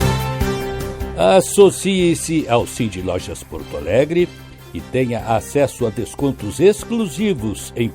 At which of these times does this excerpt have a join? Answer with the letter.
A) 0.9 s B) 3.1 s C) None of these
A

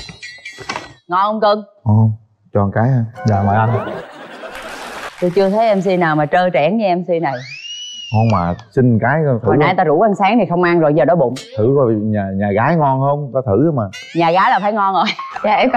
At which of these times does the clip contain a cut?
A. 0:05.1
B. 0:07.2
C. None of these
A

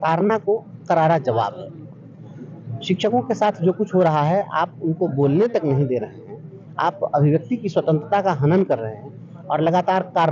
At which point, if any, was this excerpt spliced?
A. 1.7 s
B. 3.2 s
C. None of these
C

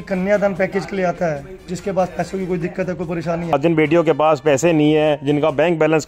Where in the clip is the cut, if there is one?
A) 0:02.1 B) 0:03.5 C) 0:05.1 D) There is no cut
B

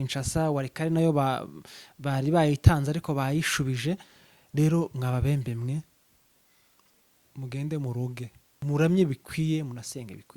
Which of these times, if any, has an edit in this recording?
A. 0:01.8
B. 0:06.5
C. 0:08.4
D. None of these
C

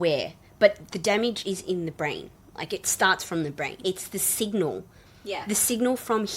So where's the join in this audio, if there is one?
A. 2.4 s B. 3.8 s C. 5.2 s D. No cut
B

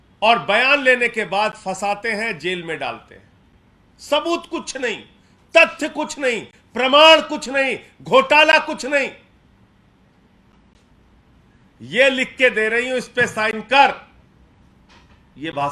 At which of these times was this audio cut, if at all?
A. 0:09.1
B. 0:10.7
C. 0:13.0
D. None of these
B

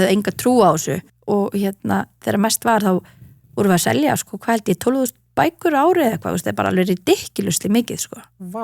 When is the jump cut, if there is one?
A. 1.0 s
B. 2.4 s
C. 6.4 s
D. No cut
A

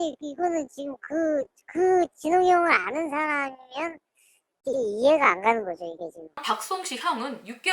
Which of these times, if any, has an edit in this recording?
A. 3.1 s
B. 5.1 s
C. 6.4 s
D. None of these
C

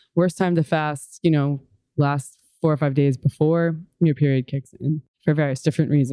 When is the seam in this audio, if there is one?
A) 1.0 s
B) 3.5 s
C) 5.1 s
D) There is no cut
C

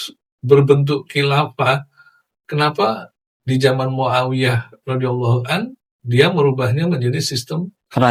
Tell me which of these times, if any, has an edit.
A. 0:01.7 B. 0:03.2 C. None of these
C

